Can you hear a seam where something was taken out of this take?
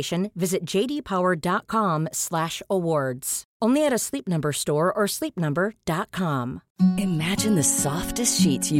yes; 1 cut; at 6.6 s

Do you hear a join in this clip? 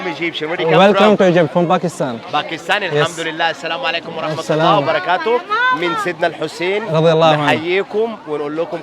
no; 0 cuts

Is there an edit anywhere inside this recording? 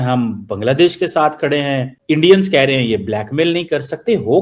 yes; 1 cut; at 1.9 s

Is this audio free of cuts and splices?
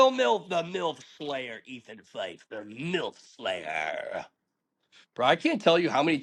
yes; 0 cuts

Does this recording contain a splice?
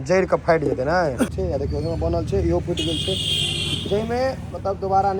yes; 1 cut; at 1.3 s

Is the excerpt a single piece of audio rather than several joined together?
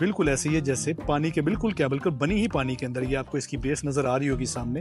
yes; 0 cuts

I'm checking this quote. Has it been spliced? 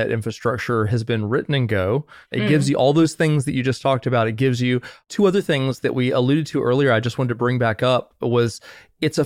no; 0 cuts

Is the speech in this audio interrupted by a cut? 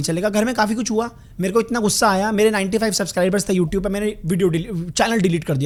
no; 0 cuts

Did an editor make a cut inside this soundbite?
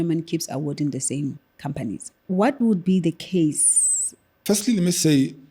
yes; 2 cuts; at 2.1 s, 4.3 s

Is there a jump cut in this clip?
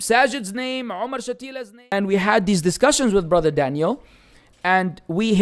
yes; 1 cut; at 1.7 s

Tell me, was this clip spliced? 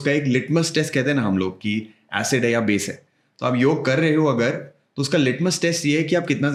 no; 0 cuts

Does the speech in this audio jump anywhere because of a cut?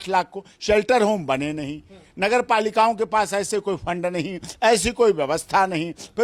no; 0 cuts

